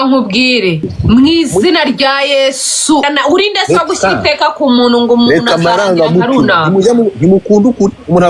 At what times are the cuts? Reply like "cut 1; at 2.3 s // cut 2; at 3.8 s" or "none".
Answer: cut 1; at 0.9 s // cut 2; at 3.1 s